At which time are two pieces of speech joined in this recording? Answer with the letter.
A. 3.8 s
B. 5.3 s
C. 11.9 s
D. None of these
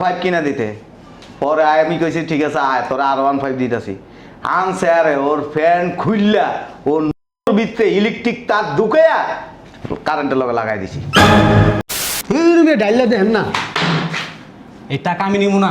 C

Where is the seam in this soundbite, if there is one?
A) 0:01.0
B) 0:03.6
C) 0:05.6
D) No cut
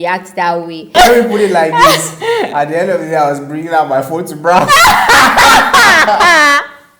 A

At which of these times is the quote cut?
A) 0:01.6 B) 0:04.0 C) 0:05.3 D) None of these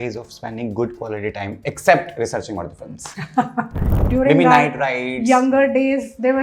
B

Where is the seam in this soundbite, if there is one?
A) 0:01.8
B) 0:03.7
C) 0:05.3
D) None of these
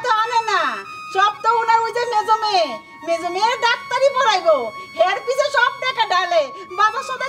D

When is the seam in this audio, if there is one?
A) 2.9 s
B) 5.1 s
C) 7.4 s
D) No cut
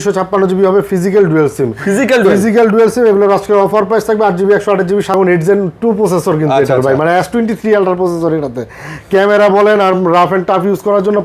B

